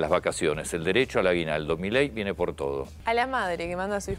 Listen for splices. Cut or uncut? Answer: cut